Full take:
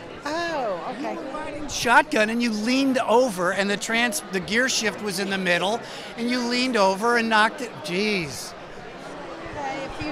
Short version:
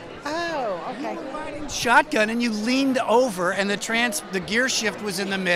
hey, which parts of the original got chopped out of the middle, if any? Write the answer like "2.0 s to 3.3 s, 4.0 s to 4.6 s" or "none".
none